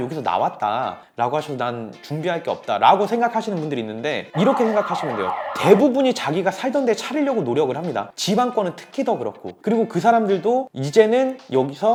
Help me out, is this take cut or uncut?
uncut